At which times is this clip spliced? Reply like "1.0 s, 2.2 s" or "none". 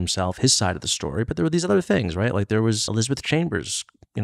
2.8 s